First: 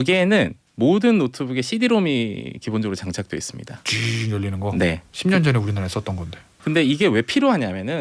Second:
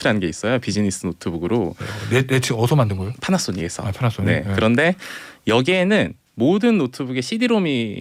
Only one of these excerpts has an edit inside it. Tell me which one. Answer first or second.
first